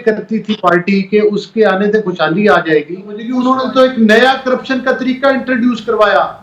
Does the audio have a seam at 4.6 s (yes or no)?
no